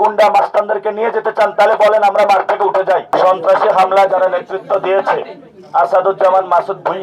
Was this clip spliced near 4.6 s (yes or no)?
no